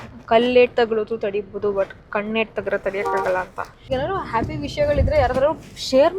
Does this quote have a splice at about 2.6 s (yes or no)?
no